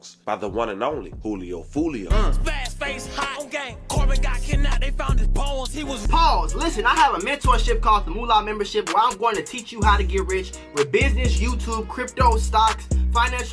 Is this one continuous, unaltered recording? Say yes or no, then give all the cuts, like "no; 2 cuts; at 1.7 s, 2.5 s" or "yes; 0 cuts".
yes; 0 cuts